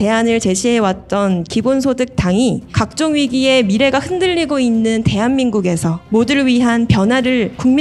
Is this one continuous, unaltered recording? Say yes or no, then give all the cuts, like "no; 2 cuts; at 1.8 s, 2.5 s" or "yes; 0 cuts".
yes; 0 cuts